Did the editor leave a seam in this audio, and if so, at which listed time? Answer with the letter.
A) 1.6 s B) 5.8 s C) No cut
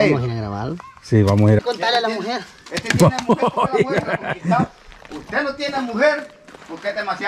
A